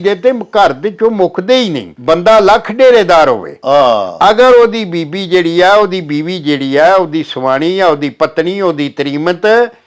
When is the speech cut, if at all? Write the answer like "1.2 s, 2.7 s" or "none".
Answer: 1.9 s